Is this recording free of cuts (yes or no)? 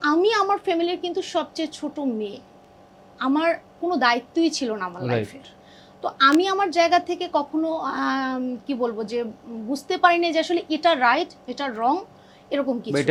yes